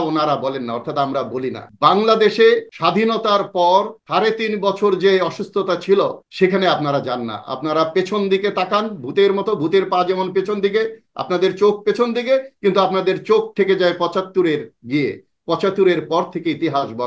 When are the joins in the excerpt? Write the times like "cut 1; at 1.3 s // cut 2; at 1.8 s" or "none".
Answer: cut 1; at 1.6 s // cut 2; at 2.7 s // cut 3; at 4.0 s // cut 4; at 6.2 s